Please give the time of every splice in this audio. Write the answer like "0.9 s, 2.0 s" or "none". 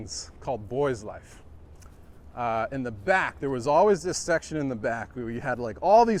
none